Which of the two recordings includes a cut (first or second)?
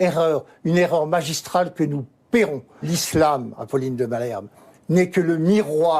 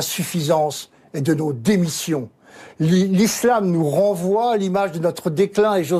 first